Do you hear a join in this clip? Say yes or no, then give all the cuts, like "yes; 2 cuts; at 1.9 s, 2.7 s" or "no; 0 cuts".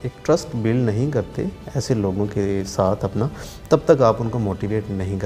no; 0 cuts